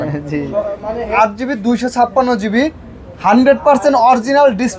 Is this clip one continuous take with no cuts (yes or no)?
no